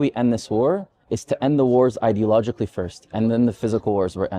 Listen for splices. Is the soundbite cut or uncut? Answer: uncut